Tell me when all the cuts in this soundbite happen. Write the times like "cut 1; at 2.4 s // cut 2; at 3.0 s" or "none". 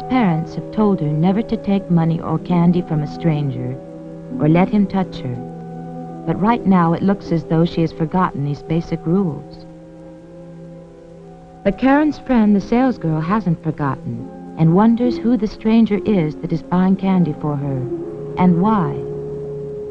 none